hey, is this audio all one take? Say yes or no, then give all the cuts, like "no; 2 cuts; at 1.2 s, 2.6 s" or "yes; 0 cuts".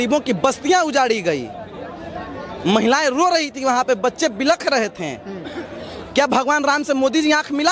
yes; 0 cuts